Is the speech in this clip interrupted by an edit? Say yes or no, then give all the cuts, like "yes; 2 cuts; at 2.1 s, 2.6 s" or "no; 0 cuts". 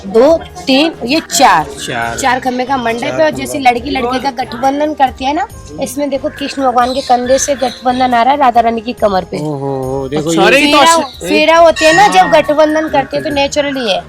no; 0 cuts